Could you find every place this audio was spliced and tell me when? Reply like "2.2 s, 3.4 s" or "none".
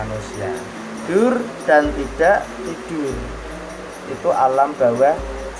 1.0 s